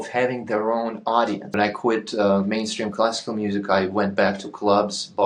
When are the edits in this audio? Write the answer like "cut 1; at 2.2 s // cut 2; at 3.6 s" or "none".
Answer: cut 1; at 1.4 s